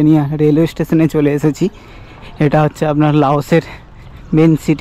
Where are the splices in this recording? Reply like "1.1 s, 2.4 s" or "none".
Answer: none